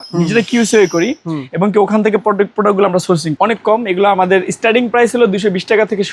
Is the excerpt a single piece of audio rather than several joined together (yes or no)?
no